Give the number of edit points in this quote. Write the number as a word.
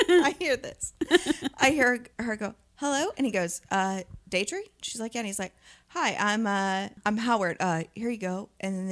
one